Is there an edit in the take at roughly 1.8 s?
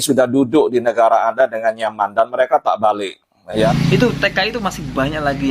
no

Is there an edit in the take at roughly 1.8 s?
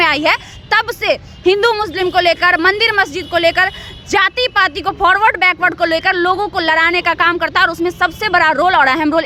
no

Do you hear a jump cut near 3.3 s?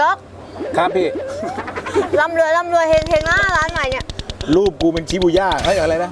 no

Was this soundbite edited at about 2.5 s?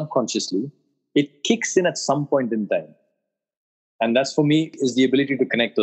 no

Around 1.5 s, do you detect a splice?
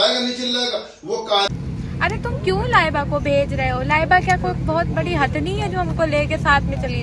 yes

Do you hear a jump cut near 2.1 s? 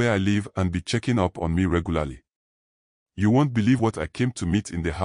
no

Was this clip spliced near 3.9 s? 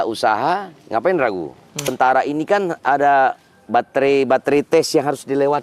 no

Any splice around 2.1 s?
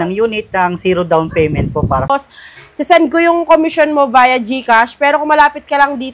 yes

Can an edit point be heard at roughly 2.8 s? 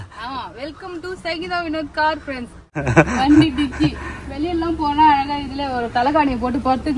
yes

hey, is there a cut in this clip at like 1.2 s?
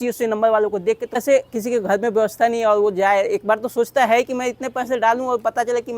yes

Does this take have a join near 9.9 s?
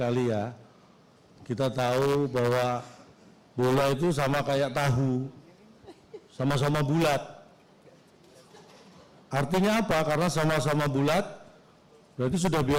no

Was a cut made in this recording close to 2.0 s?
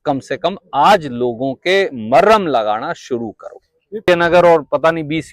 no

